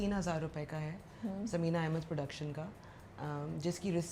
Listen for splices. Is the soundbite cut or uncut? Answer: uncut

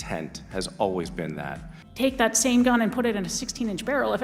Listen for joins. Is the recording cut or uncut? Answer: cut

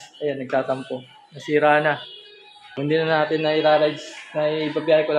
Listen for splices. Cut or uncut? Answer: cut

